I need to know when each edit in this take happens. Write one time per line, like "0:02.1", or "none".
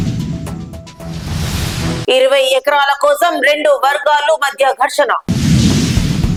none